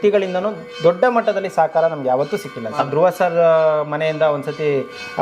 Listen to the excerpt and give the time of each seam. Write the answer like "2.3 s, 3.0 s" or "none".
2.8 s